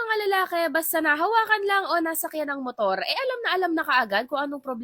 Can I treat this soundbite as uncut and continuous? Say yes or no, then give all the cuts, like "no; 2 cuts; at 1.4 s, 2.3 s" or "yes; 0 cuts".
yes; 0 cuts